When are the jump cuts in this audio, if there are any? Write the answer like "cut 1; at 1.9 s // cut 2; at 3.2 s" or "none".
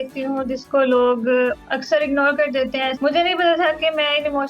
cut 1; at 2.9 s